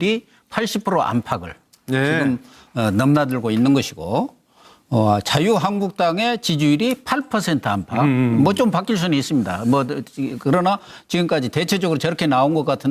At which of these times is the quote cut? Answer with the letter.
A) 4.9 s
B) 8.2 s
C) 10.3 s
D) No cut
B